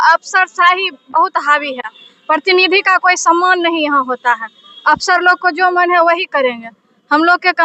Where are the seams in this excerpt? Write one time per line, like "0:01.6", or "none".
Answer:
none